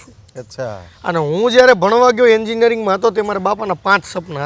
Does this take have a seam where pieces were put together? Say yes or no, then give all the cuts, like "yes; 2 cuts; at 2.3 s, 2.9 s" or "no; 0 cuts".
no; 0 cuts